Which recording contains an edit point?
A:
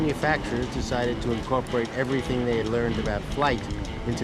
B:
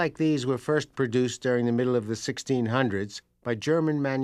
B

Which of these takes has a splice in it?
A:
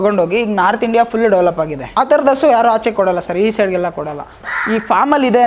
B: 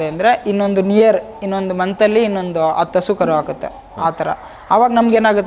A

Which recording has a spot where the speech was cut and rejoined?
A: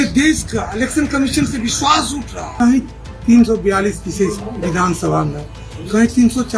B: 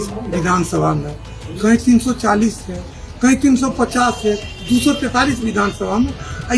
A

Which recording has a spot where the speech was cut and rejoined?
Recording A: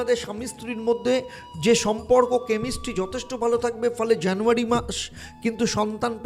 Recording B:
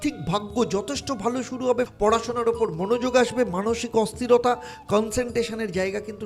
B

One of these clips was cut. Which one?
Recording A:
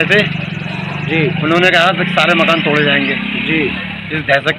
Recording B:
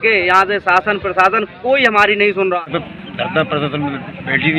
B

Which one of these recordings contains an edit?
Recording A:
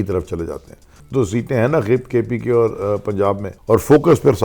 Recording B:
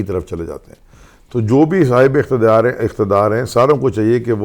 A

